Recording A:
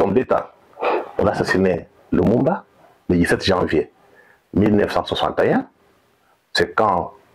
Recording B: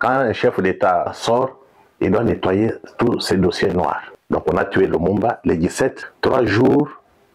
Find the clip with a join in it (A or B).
B